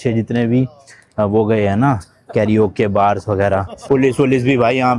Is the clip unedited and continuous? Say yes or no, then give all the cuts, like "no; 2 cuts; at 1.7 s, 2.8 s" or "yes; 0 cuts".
no; 1 cut; at 3.8 s